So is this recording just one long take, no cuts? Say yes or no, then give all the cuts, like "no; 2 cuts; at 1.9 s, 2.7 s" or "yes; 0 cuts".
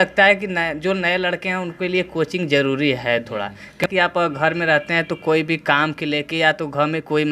no; 1 cut; at 3.8 s